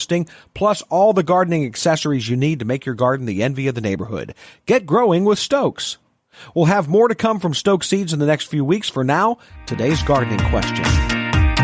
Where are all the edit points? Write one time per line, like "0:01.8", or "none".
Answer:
0:10.6